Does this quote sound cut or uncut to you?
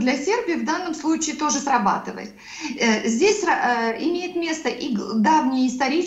uncut